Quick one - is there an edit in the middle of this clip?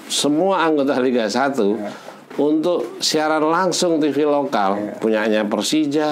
no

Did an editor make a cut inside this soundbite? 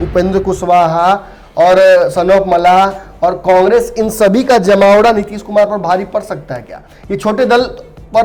no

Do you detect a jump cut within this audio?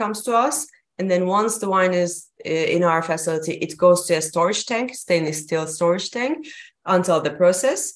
no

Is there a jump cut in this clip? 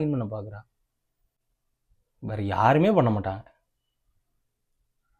no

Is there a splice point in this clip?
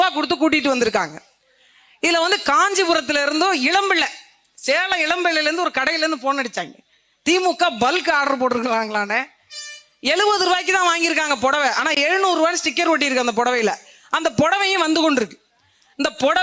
no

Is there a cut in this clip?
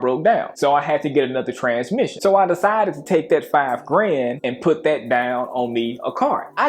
yes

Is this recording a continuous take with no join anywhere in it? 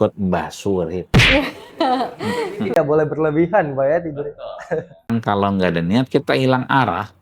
no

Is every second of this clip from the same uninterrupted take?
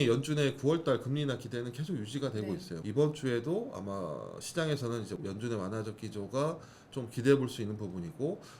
no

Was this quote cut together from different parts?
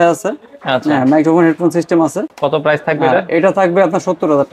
no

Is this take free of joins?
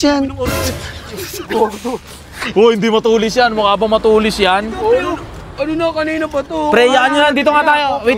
yes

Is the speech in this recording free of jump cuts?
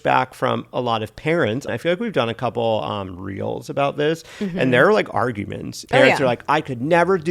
no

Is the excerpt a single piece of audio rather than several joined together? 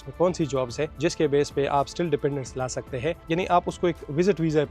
no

